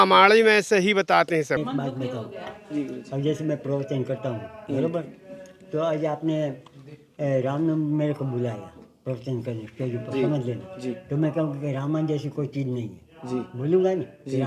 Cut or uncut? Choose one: cut